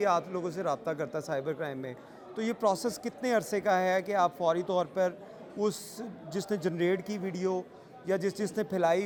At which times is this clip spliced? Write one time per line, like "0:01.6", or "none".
none